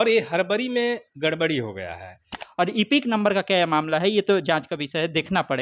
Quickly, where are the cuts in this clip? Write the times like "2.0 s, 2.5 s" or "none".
2.4 s